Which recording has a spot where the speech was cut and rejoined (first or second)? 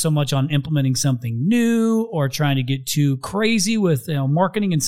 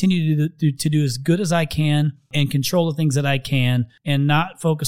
second